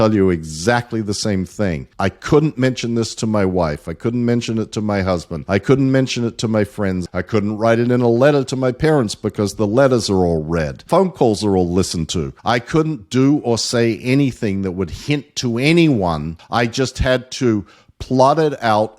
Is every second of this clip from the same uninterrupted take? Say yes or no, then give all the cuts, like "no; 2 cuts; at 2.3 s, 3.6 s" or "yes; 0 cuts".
no; 6 cuts; at 1.9 s, 5.3 s, 7.1 s, 10.8 s, 12.3 s, 16.3 s